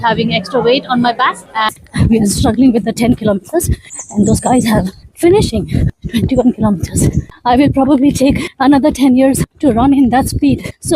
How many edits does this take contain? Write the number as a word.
two